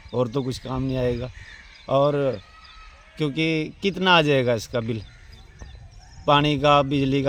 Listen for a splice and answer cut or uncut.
uncut